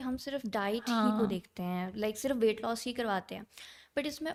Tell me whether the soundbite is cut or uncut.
uncut